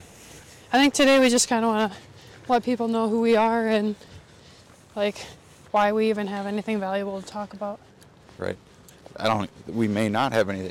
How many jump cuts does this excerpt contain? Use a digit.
0